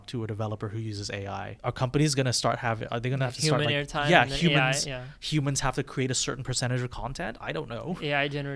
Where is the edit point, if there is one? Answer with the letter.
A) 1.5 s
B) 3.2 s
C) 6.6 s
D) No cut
A